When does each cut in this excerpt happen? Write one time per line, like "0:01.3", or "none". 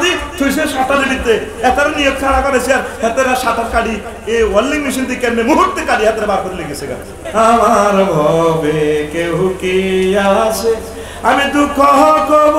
0:07.2